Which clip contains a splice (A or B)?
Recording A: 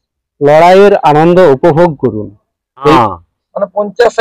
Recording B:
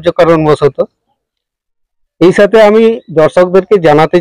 A